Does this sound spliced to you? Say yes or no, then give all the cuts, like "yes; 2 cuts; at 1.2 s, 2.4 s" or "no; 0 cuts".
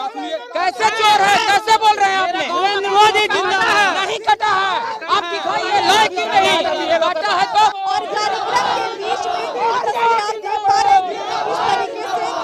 yes; 1 cut; at 7.8 s